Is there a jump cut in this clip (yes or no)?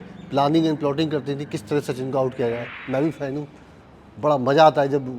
yes